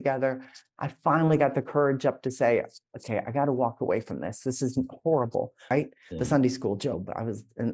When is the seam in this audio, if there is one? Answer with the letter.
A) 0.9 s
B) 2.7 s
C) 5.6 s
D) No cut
C